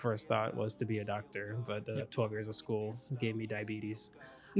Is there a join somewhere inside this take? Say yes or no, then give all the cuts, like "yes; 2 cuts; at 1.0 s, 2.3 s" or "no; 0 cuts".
no; 0 cuts